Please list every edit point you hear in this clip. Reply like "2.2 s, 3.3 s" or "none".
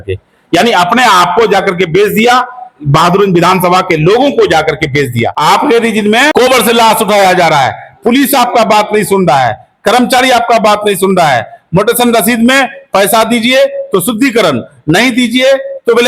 5.3 s, 6.3 s